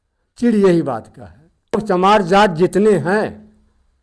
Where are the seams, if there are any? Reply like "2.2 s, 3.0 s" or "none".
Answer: 1.8 s